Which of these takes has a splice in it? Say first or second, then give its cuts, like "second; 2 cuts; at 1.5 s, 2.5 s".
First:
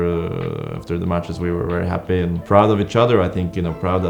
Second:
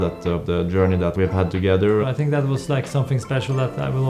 second; 2 cuts; at 1.1 s, 2.0 s